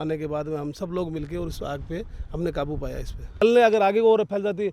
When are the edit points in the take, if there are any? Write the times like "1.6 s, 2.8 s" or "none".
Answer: 3.4 s